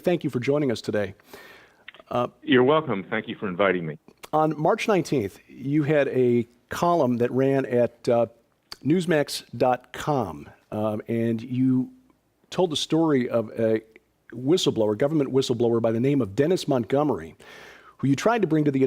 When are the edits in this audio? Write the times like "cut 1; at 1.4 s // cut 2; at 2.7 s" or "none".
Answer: cut 1; at 12.1 s